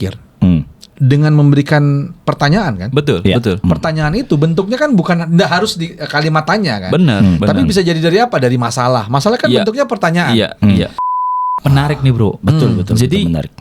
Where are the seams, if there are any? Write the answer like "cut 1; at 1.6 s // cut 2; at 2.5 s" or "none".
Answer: cut 1; at 11.1 s